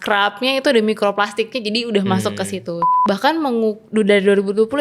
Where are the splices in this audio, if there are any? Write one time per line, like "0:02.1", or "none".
0:02.9